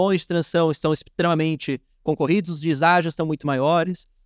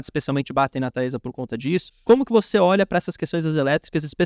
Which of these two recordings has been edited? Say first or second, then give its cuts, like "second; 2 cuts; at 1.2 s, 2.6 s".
second; 1 cut; at 1.9 s